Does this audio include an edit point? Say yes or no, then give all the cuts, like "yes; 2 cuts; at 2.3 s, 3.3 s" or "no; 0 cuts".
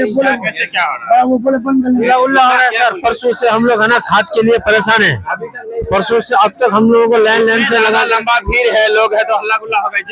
no; 0 cuts